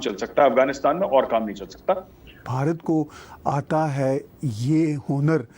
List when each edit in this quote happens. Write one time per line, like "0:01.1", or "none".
0:02.4